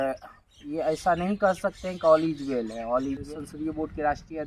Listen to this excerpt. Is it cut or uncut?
cut